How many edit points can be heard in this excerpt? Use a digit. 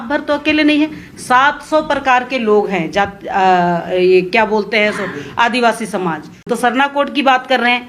1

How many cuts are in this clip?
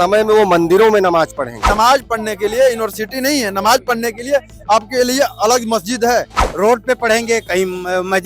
2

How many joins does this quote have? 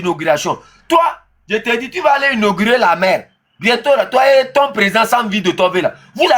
0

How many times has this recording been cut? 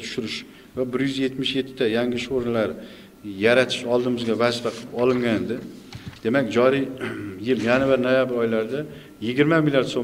0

